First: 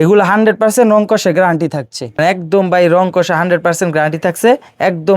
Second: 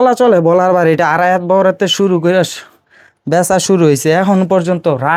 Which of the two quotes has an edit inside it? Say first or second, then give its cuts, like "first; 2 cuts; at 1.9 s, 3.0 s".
first; 1 cut; at 2.2 s